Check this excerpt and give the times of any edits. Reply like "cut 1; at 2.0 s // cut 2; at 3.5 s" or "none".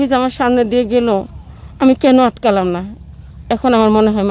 none